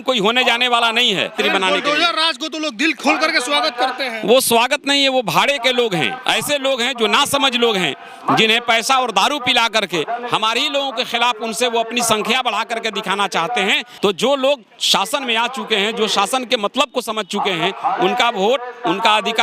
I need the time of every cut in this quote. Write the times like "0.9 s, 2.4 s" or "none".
1.3 s, 6.1 s, 13.8 s